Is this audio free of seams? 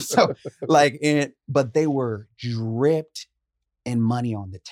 yes; 0 cuts

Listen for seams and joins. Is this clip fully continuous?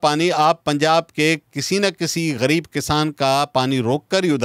yes; 0 cuts

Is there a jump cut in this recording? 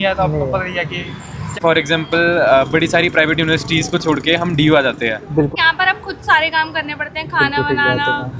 yes; 2 cuts; at 1.5 s, 5.5 s

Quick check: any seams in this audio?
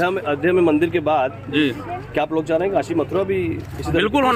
no; 0 cuts

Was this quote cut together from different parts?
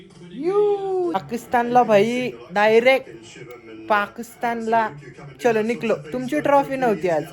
yes; 1 cut; at 1.2 s

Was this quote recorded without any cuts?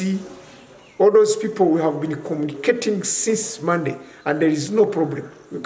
yes; 0 cuts

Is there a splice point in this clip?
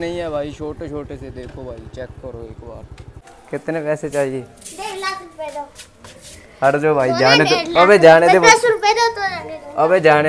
yes; 1 cut; at 3.0 s

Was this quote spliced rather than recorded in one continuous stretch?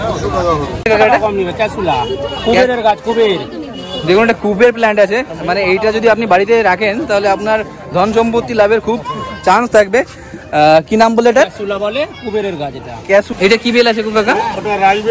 yes; 1 cut; at 13.3 s

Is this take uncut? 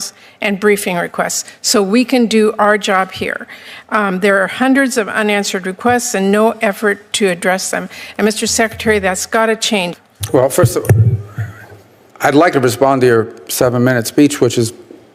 no; 1 cut; at 10.0 s

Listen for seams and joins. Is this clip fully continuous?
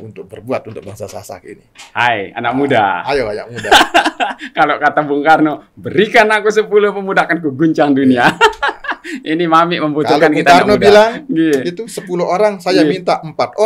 yes; 0 cuts

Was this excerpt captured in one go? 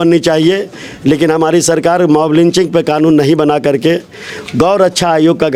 yes; 0 cuts

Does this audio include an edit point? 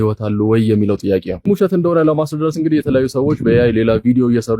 yes; 1 cut; at 1.4 s

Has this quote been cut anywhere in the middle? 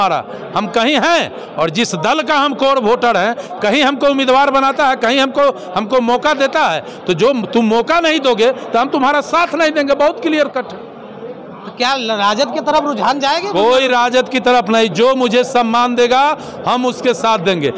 no; 0 cuts

